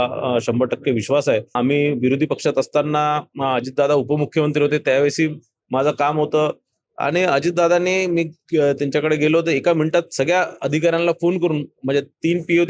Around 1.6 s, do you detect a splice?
yes; 1 cut; at 1.6 s

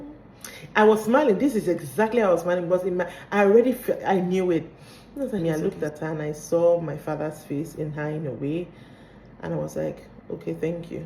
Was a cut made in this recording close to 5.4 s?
yes; 1 cut; at 5.4 s

